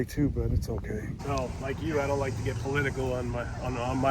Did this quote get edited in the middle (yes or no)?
yes